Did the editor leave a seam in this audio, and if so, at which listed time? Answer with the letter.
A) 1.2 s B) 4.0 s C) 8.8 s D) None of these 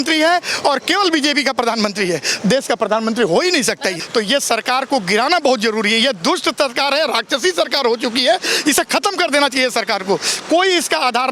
B